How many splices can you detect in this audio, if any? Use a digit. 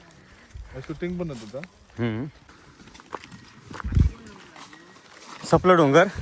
1